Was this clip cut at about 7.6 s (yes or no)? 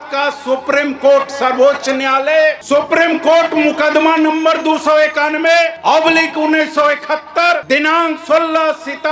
yes